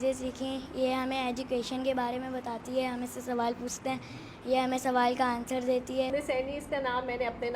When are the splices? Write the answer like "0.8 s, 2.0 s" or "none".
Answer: 6.1 s

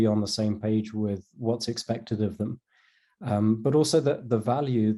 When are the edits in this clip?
none

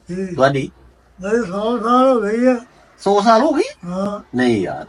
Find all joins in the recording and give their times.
none

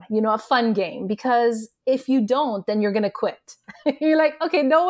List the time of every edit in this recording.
none

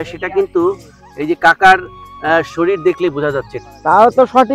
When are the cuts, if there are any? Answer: 3.6 s

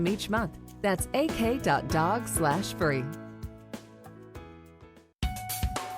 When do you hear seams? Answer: 5.0 s

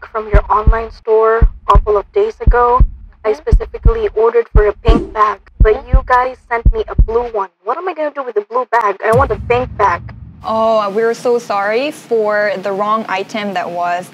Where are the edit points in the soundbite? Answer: none

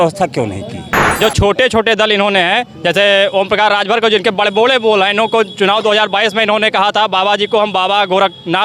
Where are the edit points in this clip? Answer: 1.1 s

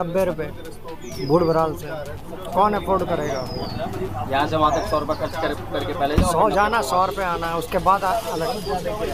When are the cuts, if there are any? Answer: none

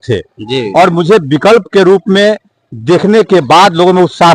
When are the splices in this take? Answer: none

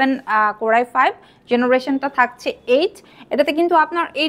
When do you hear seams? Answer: none

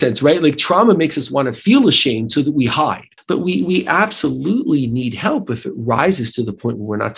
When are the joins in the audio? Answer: 3.1 s

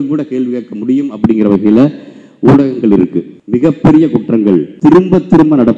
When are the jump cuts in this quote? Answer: 3.3 s, 4.7 s

